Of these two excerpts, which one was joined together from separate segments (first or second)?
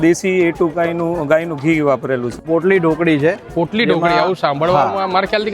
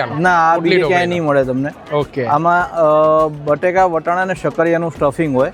first